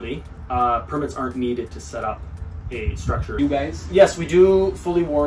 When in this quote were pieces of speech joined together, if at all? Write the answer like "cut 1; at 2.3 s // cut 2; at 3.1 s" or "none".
cut 1; at 3.3 s

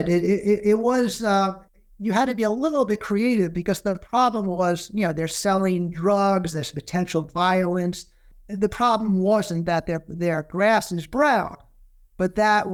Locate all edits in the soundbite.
none

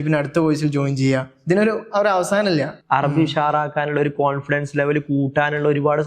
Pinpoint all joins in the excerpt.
cut 1; at 2.8 s

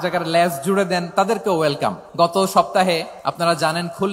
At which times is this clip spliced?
cut 1; at 2.0 s // cut 2; at 3.2 s

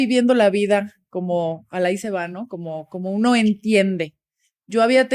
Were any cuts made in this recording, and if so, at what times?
none

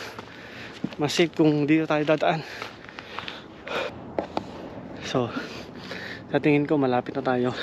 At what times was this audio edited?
cut 1; at 3.9 s

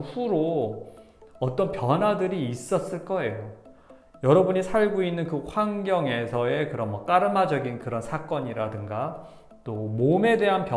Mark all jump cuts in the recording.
none

